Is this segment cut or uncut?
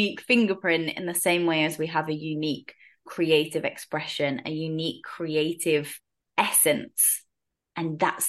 uncut